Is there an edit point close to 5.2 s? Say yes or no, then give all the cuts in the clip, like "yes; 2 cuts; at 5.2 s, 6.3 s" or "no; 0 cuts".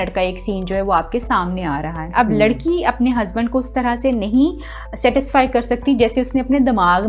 no; 1 cut; at 2.1 s